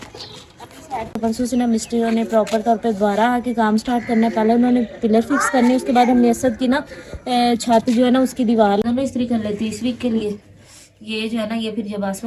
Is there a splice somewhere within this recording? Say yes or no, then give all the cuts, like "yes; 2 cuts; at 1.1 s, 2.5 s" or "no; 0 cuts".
yes; 2 cuts; at 1.2 s, 8.8 s